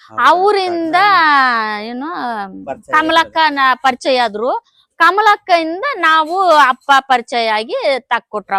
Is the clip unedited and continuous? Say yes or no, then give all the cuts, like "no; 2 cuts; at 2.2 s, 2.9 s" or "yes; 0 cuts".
yes; 0 cuts